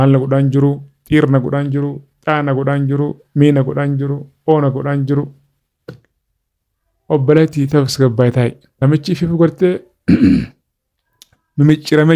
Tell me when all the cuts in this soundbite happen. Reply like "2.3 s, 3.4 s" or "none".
8.6 s